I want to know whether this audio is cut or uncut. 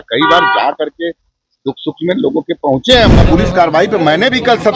cut